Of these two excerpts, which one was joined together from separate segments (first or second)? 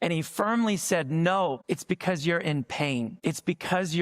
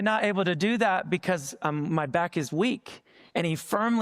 first